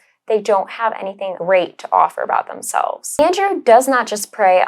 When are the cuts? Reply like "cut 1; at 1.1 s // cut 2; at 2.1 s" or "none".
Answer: cut 1; at 1.4 s // cut 2; at 3.1 s